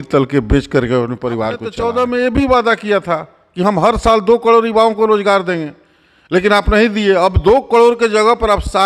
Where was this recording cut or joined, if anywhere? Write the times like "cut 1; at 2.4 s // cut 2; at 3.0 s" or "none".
cut 1; at 1.7 s